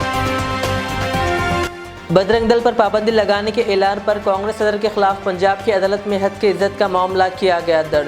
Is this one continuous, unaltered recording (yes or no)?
no